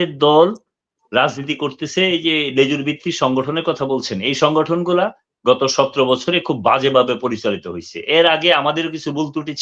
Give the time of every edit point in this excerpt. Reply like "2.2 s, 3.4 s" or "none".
none